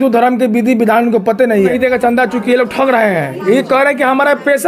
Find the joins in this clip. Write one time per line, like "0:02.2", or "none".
0:01.5